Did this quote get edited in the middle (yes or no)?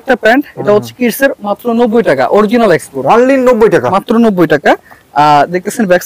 no